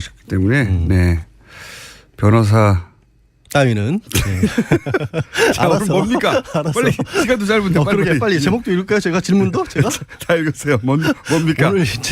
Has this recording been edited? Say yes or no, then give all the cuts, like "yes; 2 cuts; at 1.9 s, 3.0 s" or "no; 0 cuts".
yes; 1 cut; at 11.2 s